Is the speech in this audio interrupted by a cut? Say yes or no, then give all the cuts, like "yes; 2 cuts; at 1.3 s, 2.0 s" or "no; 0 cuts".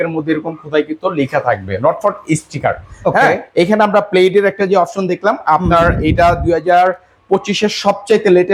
no; 0 cuts